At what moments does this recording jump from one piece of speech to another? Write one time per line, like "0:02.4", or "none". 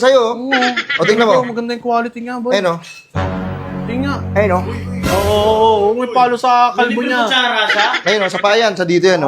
none